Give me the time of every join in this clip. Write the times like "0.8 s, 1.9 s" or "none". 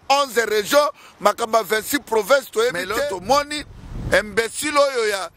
2.8 s